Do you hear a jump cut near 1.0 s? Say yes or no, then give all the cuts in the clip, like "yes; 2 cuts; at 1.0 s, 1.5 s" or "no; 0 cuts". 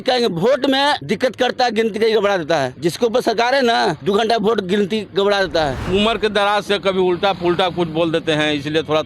yes; 4 cuts; at 1.0 s, 2.7 s, 4.0 s, 5.8 s